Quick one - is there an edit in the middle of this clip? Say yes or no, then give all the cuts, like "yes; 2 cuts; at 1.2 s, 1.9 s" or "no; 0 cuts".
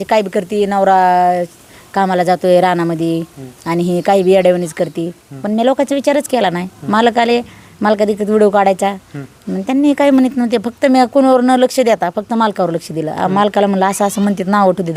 no; 0 cuts